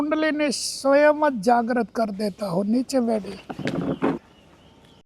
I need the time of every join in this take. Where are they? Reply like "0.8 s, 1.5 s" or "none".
4.2 s